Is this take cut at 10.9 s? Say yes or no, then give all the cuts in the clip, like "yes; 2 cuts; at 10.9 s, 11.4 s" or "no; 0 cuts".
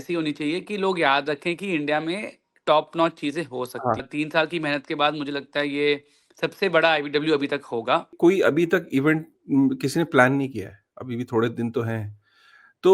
no; 2 cuts; at 4.1 s, 8.1 s